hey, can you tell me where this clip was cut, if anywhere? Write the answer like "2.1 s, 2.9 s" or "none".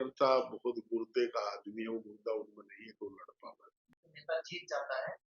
4.0 s